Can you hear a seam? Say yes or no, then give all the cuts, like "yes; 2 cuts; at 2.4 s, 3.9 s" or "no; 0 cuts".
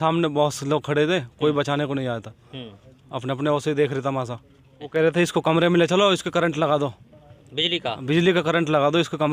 yes; 1 cut; at 4.9 s